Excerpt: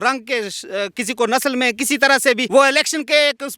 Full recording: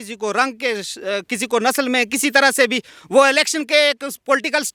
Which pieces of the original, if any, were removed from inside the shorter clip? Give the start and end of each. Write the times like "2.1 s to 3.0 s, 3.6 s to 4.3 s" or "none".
2.8 s to 3.0 s